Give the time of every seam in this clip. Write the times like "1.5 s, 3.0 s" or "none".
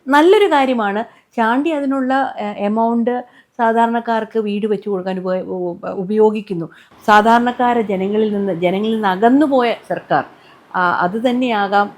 6.9 s